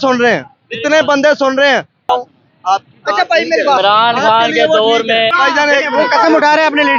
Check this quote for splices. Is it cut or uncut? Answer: cut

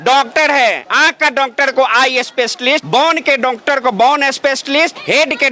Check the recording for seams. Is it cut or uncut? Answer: uncut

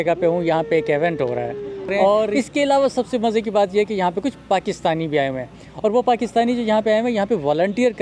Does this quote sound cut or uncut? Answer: cut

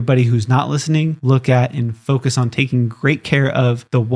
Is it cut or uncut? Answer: cut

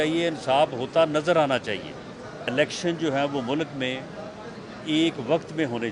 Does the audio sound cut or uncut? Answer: cut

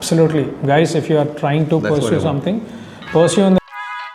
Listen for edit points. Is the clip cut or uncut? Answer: uncut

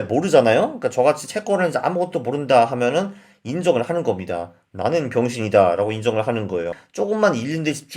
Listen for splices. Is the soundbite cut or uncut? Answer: cut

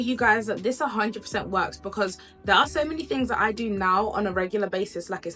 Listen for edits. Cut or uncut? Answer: uncut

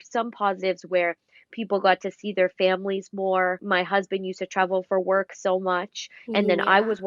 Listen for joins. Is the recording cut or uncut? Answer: cut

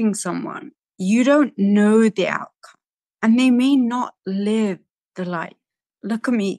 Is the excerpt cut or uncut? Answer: uncut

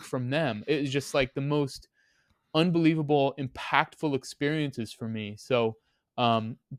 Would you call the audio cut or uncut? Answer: uncut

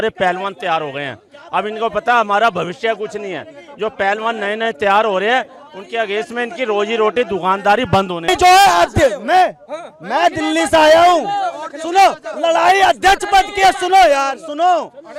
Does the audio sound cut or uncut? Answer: uncut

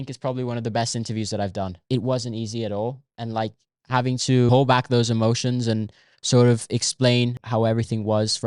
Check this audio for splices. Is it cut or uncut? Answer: cut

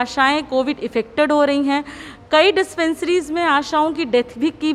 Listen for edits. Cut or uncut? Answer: uncut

